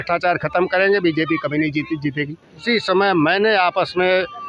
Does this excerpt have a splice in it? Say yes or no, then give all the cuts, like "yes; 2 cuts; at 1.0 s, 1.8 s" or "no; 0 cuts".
yes; 1 cut; at 2.6 s